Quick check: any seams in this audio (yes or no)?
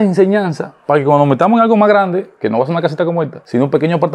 no